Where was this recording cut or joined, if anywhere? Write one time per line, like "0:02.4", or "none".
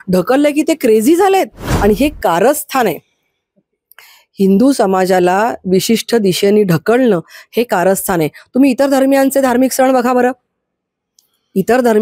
0:01.7